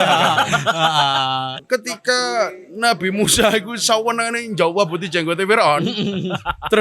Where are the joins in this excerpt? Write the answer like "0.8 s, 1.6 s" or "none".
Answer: 1.5 s